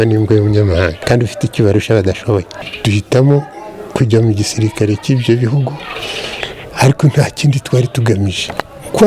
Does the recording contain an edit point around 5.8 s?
no; 2 cuts; at 1.0 s, 2.6 s

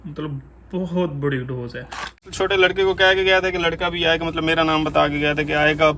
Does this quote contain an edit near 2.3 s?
yes; 1 cut; at 2.3 s

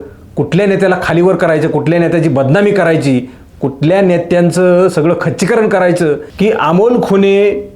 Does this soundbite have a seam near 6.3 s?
yes; 1 cut; at 6.3 s

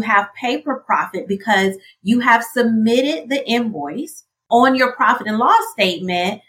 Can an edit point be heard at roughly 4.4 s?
yes; 1 cut; at 4.4 s

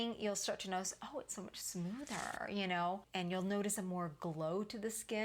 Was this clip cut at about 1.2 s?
no; 1 cut; at 3.1 s

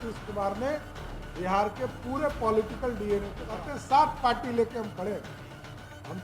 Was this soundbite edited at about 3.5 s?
yes; 1 cut; at 3.5 s

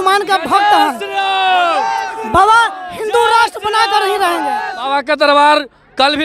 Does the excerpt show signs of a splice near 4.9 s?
yes; 1 cut; at 4.9 s

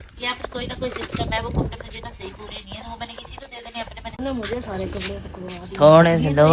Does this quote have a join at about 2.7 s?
no; 1 cut; at 4.2 s

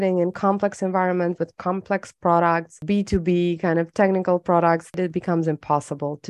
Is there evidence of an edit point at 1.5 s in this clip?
no; 2 cuts; at 2.8 s, 5.0 s

